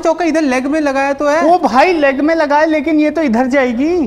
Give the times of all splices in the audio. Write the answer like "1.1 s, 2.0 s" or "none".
none